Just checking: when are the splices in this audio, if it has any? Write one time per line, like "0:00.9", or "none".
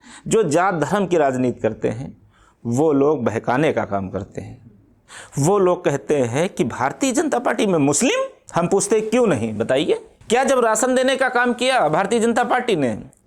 0:08.4
0:10.1